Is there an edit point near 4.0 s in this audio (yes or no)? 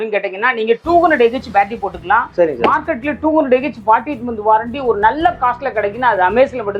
no